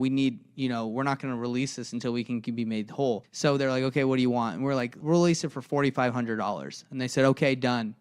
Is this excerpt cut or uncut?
cut